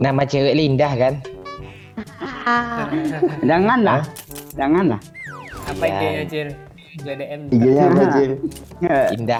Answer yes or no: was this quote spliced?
no